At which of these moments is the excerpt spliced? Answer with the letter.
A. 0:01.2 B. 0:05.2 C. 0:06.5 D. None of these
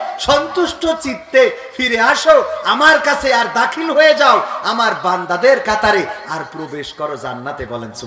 D